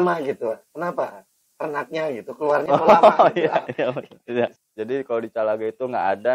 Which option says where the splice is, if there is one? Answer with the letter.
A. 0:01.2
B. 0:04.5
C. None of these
B